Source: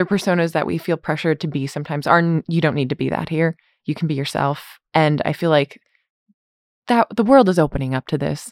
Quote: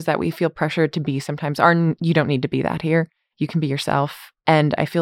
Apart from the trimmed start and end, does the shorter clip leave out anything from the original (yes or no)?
no